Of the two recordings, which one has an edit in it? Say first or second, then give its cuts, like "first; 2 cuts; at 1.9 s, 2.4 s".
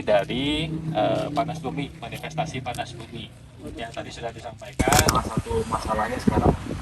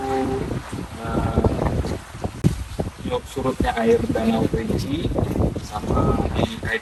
first; 1 cut; at 5.0 s